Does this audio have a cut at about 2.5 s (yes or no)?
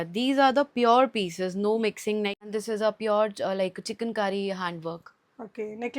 yes